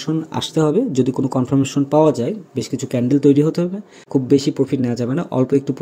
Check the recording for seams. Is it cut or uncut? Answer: cut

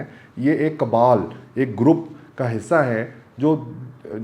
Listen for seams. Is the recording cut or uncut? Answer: uncut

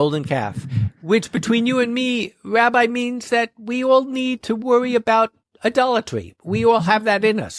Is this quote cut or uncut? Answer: uncut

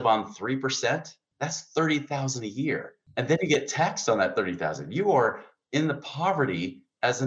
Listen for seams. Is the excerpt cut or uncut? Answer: cut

